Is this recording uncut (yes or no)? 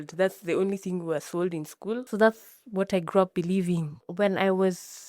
no